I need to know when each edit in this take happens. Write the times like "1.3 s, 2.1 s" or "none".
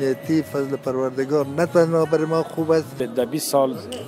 2.9 s